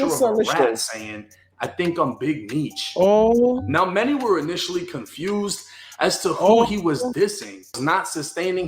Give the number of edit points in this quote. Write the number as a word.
one